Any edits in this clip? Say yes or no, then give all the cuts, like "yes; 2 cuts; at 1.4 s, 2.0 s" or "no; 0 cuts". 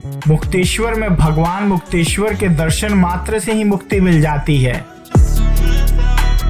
no; 0 cuts